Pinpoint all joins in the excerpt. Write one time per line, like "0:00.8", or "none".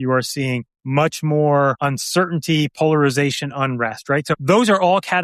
none